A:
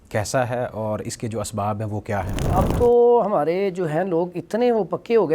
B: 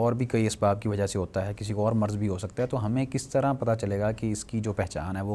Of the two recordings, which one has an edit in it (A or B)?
A